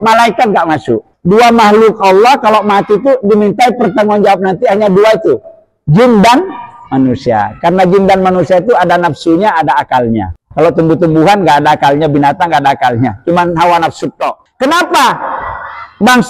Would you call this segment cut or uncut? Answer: cut